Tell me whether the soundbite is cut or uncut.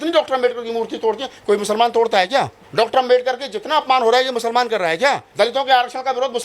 cut